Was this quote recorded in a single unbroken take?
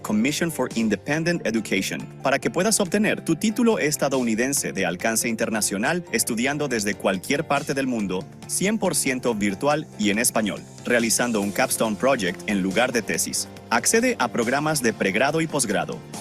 yes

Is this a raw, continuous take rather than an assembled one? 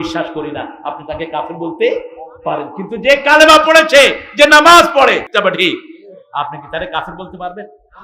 no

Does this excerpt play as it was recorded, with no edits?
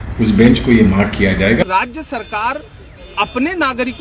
no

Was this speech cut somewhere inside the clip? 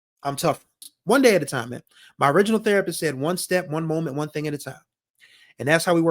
yes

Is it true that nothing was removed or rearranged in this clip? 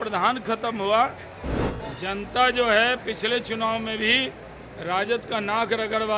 no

